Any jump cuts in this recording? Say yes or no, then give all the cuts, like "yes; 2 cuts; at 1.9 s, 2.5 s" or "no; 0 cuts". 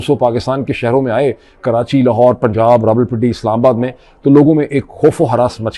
no; 0 cuts